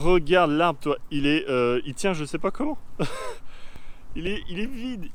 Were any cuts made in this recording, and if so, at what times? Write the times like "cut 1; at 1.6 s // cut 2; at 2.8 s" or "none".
none